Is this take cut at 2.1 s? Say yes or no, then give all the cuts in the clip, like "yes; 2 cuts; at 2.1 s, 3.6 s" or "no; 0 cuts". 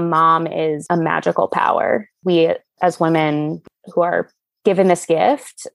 yes; 2 cuts; at 2.1 s, 3.6 s